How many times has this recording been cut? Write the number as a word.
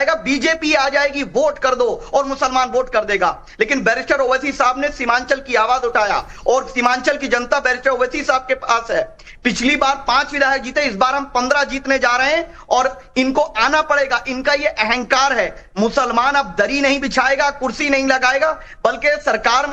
one